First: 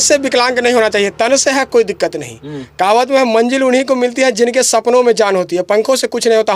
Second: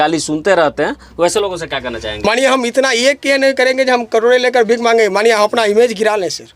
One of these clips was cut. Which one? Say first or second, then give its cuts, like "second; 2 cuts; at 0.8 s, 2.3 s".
second; 1 cut; at 2.2 s